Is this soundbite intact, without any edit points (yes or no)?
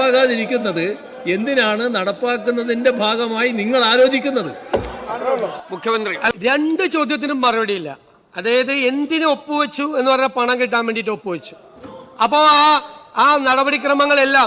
no